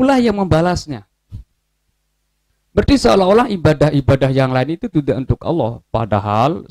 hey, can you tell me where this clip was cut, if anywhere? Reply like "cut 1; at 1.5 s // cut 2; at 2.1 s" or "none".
none